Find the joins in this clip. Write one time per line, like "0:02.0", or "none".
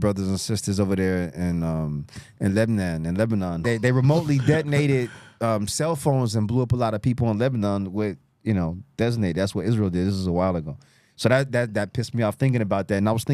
0:03.6